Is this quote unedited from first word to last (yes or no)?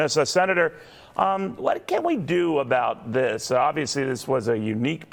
yes